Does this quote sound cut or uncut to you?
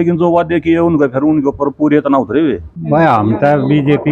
cut